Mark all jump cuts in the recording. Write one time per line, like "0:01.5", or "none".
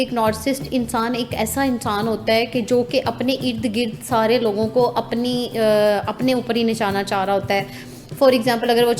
none